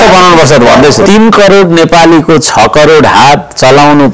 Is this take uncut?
no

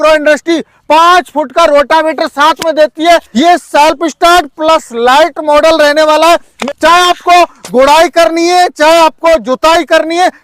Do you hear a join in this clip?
yes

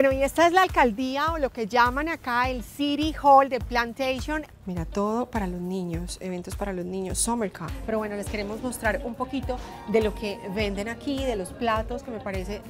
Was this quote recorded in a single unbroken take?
no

